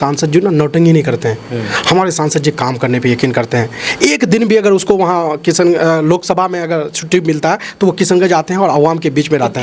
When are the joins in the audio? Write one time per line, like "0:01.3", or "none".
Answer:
none